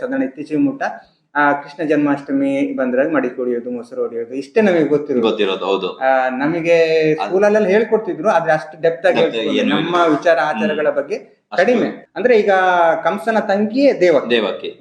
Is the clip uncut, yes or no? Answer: no